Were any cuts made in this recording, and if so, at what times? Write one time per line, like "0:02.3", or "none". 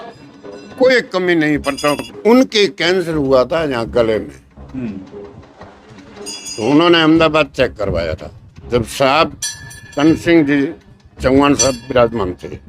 0:02.0